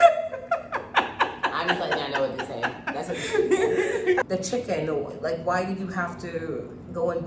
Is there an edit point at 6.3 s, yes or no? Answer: no